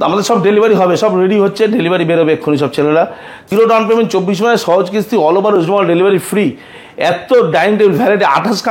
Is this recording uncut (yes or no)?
no